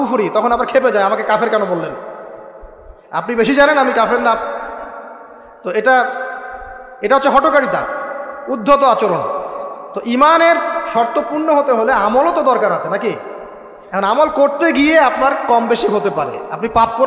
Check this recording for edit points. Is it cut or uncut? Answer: uncut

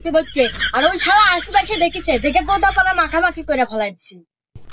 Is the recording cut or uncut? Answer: uncut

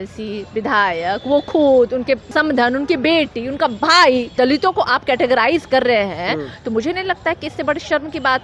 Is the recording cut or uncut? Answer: cut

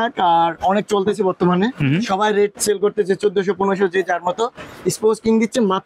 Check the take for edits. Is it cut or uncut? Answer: uncut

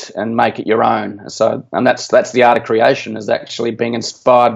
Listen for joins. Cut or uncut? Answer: uncut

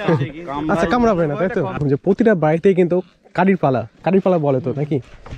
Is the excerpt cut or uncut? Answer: cut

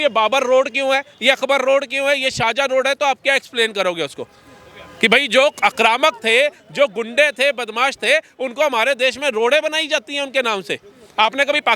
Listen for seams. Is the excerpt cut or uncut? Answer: uncut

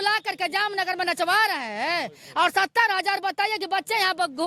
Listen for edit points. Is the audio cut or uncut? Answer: uncut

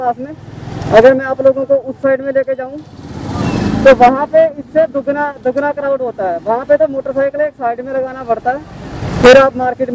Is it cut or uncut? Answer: uncut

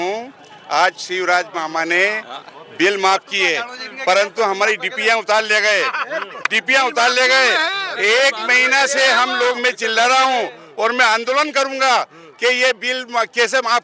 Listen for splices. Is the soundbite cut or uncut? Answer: uncut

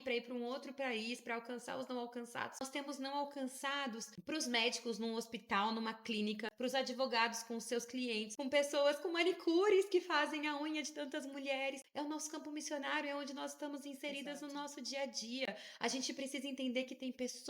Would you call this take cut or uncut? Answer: cut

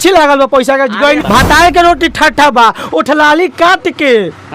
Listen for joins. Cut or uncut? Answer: cut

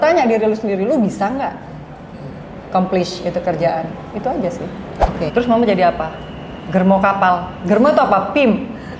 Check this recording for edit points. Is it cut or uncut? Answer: cut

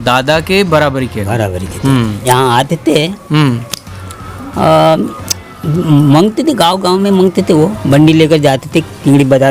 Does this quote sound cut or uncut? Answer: cut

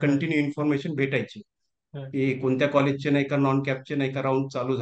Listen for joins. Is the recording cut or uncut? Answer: uncut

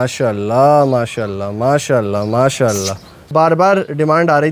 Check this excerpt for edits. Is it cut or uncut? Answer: cut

